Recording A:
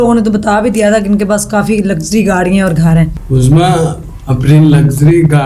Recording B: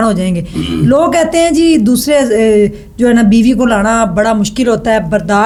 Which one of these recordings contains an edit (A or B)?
A